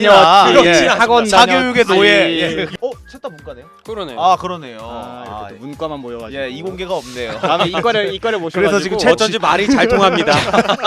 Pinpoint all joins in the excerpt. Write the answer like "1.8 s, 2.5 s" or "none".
2.7 s